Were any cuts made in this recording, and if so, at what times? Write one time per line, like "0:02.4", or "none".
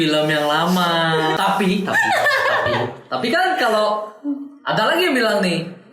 0:01.4